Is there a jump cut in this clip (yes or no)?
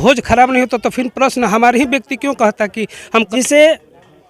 yes